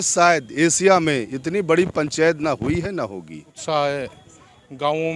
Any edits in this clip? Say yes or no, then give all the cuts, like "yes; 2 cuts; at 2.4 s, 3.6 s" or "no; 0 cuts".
yes; 1 cut; at 3.5 s